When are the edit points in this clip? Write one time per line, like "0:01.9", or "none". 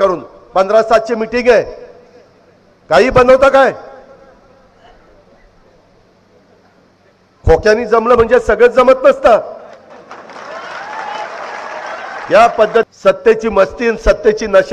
0:12.9